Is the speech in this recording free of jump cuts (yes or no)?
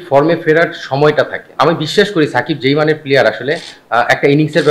no